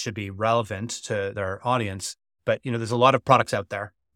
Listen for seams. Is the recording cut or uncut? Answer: cut